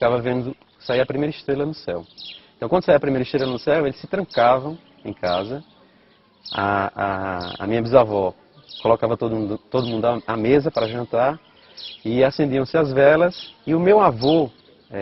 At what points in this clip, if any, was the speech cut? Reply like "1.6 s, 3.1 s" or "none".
none